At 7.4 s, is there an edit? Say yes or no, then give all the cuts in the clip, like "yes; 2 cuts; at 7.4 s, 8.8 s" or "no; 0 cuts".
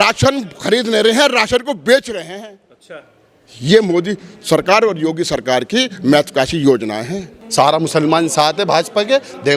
yes; 1 cut; at 7.4 s